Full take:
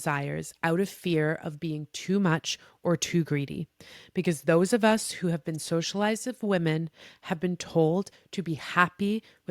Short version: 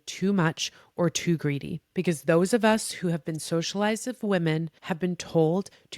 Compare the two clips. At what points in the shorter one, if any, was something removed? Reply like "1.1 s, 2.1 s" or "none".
1.8 s, 4.8 s